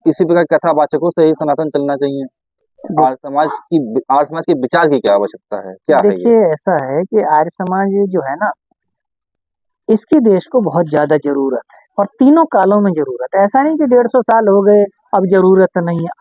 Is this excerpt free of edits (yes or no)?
yes